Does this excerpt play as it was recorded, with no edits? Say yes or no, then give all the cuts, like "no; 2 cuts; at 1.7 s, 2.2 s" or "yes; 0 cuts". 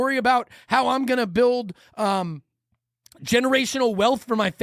yes; 0 cuts